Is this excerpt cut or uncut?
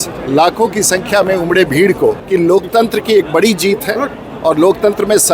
cut